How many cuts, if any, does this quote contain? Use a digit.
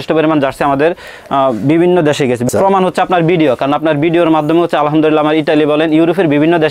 1